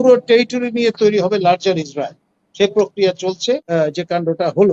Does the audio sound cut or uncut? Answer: cut